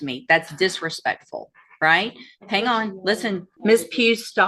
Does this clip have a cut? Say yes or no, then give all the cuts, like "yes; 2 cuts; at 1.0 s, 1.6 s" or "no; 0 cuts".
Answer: yes; 1 cut; at 3.5 s